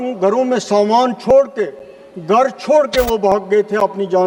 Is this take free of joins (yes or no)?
yes